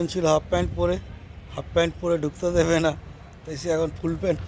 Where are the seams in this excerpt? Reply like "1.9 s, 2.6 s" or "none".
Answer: none